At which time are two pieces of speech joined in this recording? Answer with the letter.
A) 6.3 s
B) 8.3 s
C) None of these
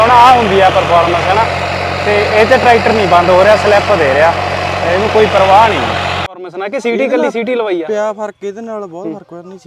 A